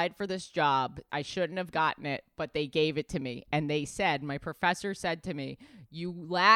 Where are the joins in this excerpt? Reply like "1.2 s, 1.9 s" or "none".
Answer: 1.1 s